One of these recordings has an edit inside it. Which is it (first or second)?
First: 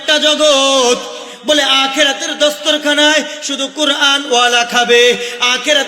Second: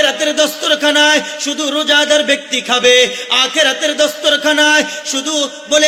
first